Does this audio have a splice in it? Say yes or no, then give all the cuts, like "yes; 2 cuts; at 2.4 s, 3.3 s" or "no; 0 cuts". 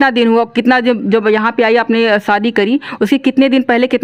no; 0 cuts